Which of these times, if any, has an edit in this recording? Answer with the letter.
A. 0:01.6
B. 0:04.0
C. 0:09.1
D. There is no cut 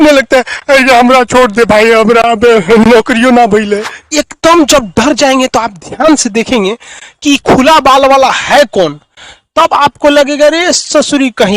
B